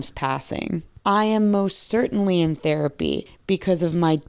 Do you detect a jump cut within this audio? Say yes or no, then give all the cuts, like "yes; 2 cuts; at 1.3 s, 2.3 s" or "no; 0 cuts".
yes; 2 cuts; at 0.9 s, 3.3 s